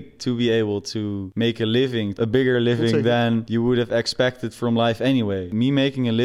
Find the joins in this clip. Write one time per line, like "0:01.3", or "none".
0:01.2
0:02.1
0:03.5
0:05.5